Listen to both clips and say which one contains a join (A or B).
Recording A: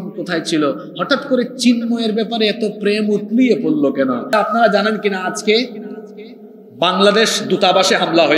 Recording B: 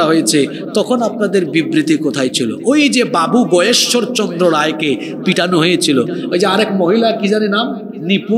A